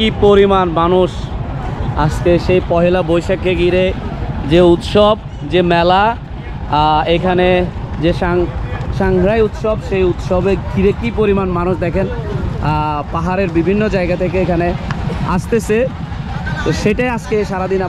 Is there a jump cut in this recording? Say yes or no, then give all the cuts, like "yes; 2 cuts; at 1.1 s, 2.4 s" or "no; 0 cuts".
no; 0 cuts